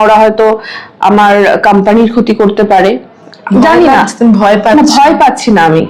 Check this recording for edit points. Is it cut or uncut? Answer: uncut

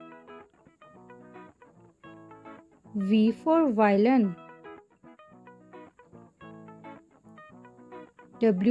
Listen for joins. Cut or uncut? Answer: uncut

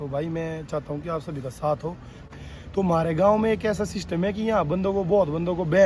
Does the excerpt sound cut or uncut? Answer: cut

